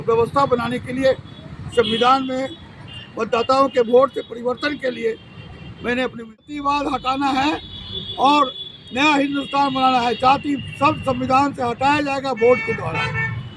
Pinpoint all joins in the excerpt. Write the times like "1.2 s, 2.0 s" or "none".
6.5 s

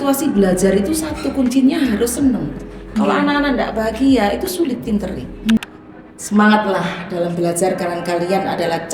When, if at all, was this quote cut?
5.6 s

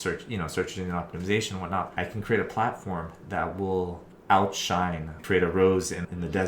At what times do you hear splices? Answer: 1.9 s, 4.1 s

